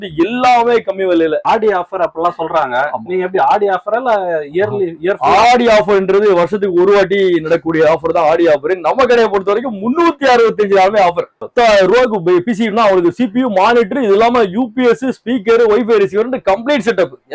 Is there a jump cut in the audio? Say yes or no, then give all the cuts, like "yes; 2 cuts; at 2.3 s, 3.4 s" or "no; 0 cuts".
yes; 2 cuts; at 1.4 s, 11.4 s